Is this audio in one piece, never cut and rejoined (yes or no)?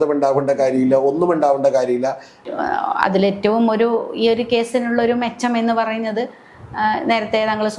no